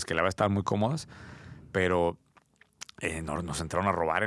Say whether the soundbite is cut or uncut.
uncut